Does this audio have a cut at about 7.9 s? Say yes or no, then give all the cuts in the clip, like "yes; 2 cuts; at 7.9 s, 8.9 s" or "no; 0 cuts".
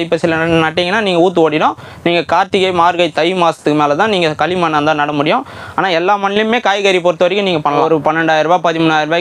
yes; 1 cut; at 7.9 s